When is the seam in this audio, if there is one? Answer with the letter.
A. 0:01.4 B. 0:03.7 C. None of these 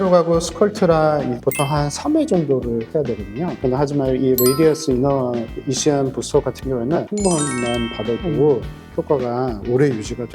A